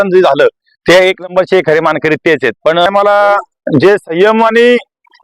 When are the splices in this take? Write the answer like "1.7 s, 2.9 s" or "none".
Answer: 2.9 s